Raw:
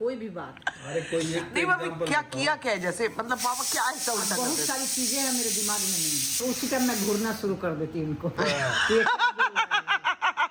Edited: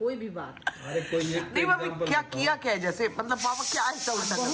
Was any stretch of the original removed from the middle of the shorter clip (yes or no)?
no